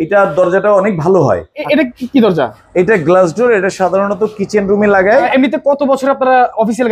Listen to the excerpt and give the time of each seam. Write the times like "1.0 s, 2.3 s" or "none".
1.5 s, 5.3 s